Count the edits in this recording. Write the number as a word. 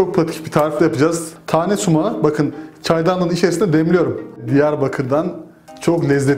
two